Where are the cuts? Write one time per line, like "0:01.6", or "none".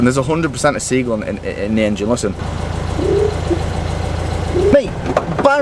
0:02.4
0:04.7